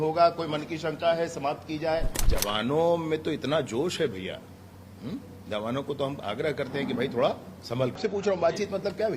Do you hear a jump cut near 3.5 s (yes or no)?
no